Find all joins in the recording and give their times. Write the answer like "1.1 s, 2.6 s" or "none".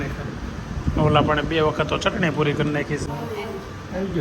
3.0 s

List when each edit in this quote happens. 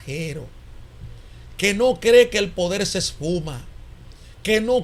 none

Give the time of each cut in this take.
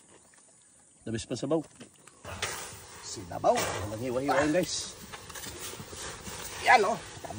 2.3 s

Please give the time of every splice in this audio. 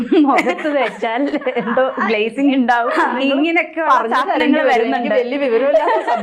none

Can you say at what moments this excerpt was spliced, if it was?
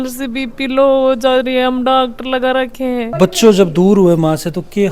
3.1 s

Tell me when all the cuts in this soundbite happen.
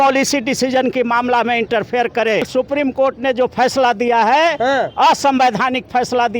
2.5 s

